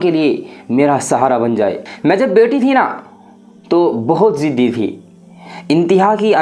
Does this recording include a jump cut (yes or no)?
yes